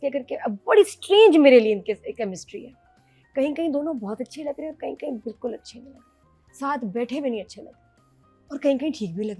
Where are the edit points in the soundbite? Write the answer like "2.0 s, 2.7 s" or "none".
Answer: none